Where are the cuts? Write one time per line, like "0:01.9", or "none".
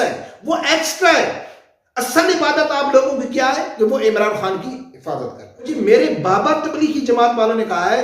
0:05.7